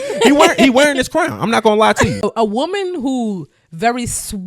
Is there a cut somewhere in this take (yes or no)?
yes